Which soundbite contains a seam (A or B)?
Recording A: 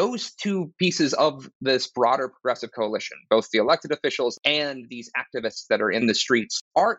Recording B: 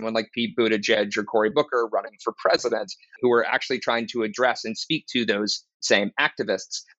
A